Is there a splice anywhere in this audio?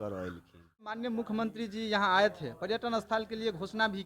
yes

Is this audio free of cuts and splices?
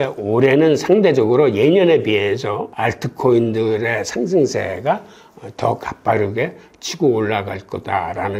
yes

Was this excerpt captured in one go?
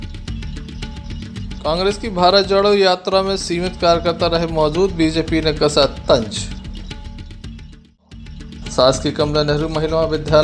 yes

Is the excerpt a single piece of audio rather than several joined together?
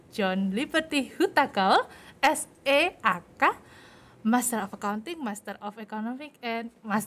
yes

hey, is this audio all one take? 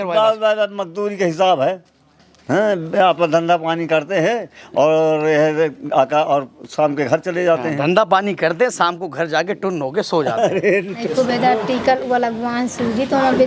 no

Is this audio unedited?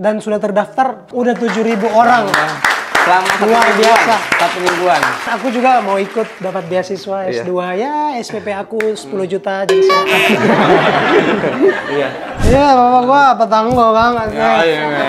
no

